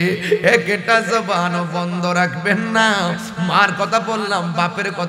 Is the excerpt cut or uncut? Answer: uncut